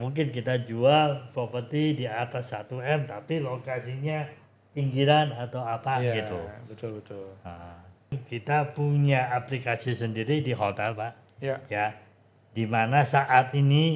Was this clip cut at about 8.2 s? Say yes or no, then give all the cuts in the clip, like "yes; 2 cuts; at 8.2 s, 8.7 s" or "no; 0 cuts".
yes; 1 cut; at 8.2 s